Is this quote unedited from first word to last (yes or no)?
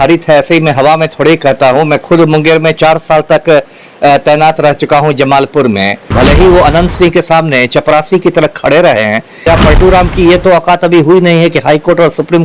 no